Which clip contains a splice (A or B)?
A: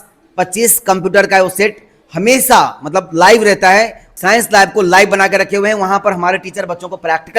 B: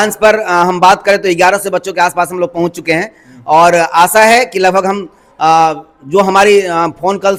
A